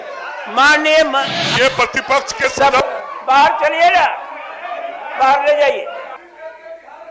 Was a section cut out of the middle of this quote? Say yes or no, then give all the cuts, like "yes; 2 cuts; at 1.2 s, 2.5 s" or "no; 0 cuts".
yes; 1 cut; at 1.5 s